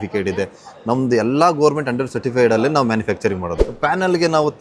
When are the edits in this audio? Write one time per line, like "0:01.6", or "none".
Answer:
0:03.6